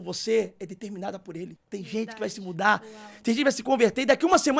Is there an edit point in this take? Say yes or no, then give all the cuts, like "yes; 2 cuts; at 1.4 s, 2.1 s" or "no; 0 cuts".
yes; 1 cut; at 1.6 s